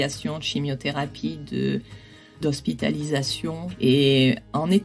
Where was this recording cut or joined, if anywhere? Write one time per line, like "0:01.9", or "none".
0:02.4
0:03.7